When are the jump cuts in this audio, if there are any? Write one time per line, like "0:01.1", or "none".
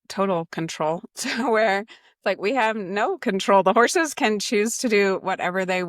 none

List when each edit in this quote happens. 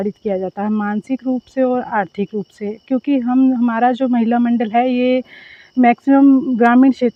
none

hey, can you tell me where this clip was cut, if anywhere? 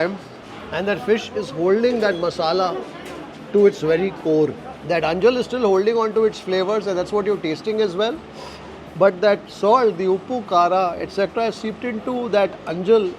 none

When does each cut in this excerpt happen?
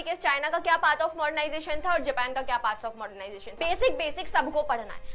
0:03.6

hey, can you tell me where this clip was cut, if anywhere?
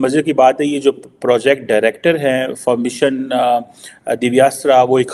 none

